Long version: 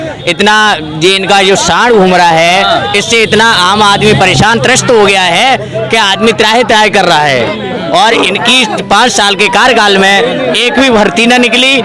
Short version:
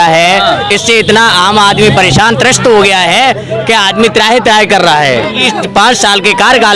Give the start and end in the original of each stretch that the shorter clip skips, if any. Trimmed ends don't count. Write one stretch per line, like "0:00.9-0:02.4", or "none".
0:07.7-0:08.6